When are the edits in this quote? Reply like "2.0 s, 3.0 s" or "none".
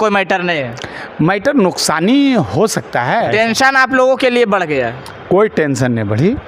3.3 s